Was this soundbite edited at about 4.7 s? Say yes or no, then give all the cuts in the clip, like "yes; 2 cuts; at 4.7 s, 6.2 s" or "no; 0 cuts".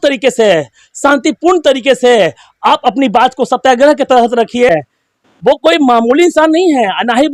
yes; 1 cut; at 4.7 s